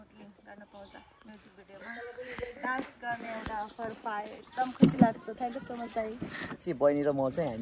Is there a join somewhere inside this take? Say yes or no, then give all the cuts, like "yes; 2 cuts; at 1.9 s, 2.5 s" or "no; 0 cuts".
yes; 1 cut; at 6.6 s